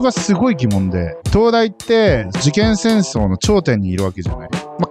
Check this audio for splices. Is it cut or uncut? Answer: cut